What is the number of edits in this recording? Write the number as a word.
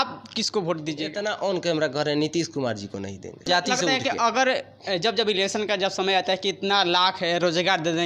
two